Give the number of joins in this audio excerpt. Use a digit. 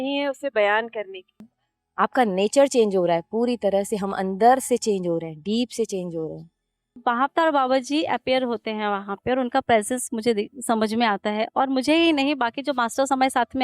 2